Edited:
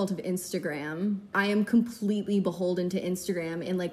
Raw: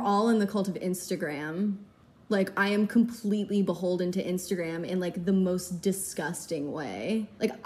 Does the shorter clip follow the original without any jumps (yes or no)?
no